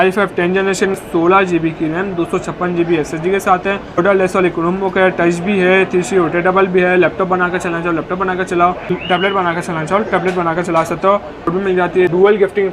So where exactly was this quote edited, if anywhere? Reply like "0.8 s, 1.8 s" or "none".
1.0 s, 4.0 s, 8.9 s, 11.6 s

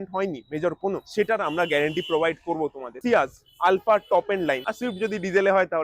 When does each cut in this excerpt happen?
3.0 s, 4.6 s

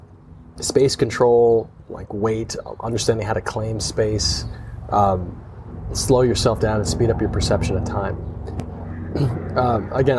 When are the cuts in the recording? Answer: 8.7 s

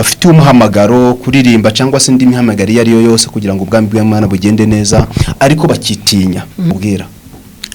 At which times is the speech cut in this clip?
6.7 s

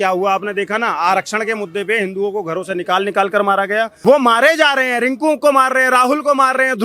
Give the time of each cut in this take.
3.9 s

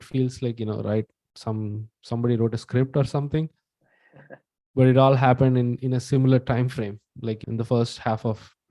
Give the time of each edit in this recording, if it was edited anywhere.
5.8 s

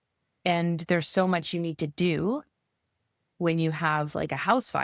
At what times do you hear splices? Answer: none

